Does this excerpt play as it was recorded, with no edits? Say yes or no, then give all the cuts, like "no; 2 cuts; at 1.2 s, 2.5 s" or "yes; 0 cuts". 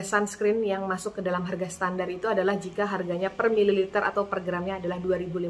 yes; 0 cuts